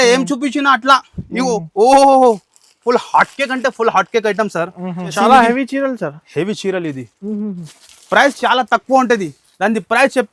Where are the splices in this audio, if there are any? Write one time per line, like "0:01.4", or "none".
0:05.1